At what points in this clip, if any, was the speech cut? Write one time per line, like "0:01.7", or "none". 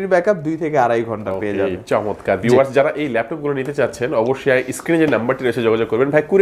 none